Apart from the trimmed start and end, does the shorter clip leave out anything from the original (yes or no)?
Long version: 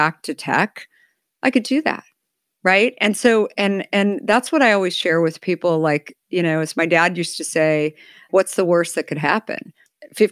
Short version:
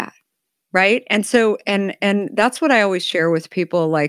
no